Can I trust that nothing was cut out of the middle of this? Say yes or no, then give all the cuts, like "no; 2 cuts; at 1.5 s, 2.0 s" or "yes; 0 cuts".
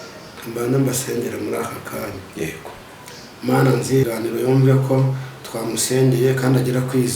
no; 1 cut; at 4.0 s